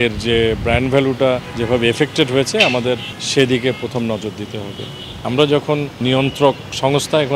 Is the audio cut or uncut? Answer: cut